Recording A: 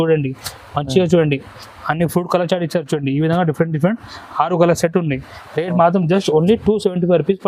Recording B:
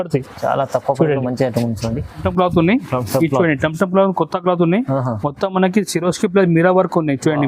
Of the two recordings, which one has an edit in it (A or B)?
B